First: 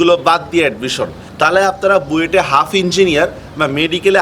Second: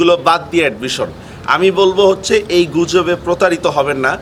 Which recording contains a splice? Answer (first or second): first